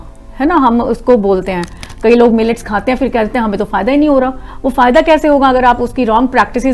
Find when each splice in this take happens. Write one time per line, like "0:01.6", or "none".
0:01.8